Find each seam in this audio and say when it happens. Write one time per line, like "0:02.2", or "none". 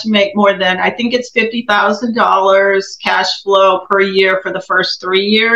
none

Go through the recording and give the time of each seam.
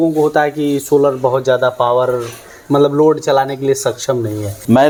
none

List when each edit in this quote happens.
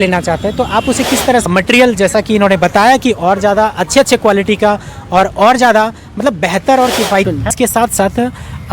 0:01.4
0:07.3

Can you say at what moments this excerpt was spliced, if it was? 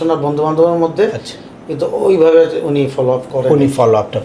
none

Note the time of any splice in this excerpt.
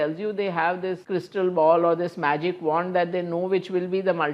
0:01.0

